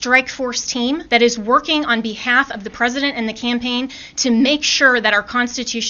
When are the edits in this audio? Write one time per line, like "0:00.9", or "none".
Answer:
0:01.0